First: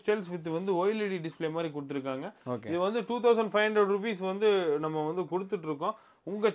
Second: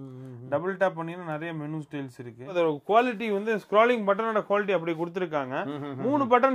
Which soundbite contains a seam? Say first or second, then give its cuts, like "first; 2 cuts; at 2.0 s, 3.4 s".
second; 1 cut; at 2.5 s